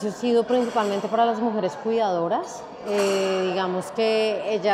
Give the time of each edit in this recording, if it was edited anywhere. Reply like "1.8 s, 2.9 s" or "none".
none